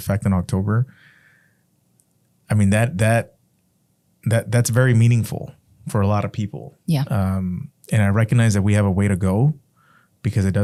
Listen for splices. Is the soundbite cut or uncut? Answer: uncut